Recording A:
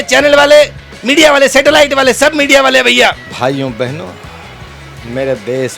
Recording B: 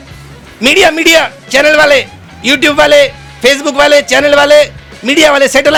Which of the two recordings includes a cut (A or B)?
A